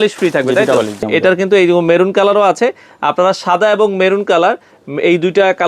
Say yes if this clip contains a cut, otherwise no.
yes